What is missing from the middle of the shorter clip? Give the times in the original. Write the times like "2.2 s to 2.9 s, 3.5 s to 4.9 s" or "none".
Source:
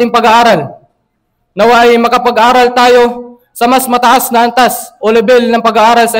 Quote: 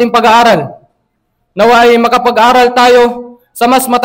none